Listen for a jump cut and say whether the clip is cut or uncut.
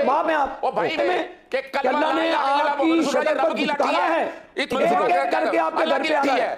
cut